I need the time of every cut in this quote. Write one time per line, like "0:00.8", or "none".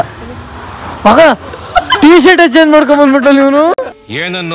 none